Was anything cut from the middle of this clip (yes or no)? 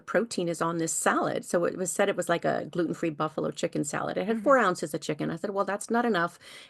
no